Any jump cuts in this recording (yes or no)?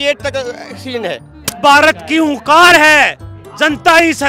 yes